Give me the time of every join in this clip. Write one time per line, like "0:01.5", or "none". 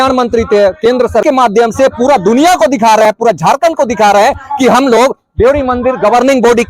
0:01.2